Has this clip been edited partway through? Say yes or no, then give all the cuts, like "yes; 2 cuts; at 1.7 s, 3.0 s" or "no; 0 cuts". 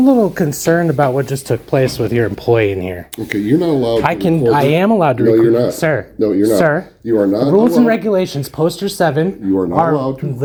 no; 0 cuts